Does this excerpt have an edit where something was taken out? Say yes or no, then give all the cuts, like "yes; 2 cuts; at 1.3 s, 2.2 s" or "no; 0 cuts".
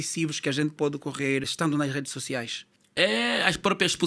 no; 0 cuts